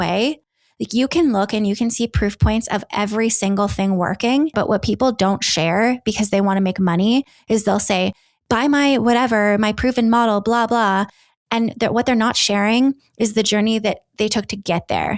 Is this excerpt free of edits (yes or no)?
no